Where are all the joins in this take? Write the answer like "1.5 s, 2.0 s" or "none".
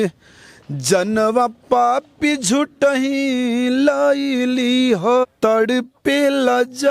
5.2 s